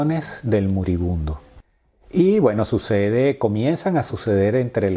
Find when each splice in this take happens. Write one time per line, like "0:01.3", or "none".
none